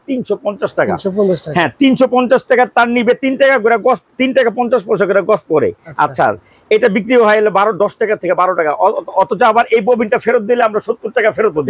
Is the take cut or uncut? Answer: uncut